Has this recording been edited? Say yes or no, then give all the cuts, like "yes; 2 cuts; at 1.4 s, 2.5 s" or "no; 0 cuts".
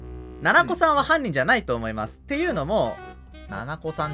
yes; 1 cut; at 3.0 s